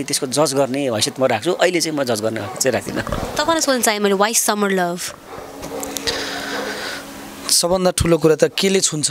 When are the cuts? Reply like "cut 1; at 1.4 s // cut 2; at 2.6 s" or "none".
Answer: none